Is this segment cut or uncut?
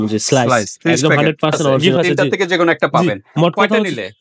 cut